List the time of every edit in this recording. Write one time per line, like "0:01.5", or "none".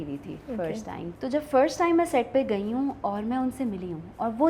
0:01.1

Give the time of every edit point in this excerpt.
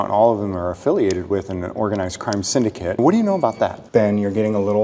0:03.0
0:03.8

